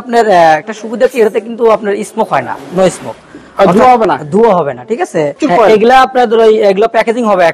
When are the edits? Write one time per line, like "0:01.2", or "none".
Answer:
0:05.4